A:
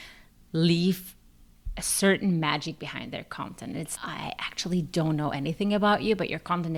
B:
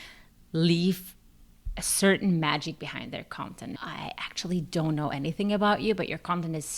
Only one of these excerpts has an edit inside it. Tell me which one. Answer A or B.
B